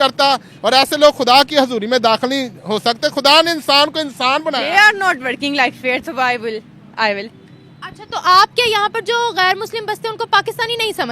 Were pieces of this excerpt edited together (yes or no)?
yes